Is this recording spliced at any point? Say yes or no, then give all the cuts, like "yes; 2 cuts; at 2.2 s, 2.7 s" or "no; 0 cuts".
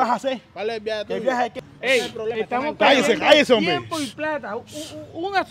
yes; 1 cut; at 1.6 s